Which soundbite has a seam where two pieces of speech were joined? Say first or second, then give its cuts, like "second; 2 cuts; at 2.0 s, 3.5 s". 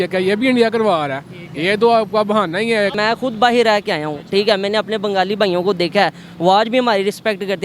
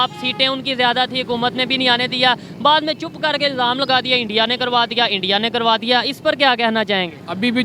first; 1 cut; at 3.0 s